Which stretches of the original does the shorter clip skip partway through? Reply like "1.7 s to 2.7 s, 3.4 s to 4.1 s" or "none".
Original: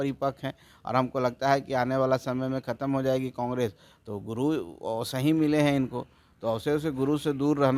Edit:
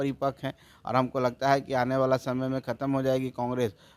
none